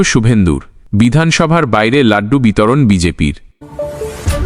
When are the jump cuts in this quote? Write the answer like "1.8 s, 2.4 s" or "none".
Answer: 3.4 s